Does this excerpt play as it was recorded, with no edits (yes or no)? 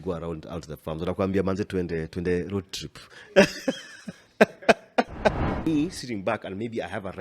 no